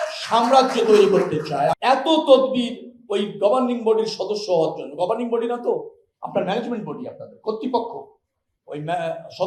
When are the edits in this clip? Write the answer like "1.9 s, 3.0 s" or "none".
1.7 s